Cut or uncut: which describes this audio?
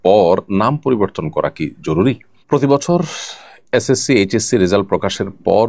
cut